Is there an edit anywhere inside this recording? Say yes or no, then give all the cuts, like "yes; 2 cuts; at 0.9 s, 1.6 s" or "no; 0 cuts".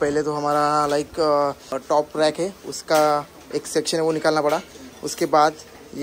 yes; 1 cut; at 1.7 s